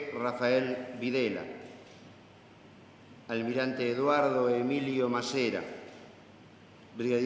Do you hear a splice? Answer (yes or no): yes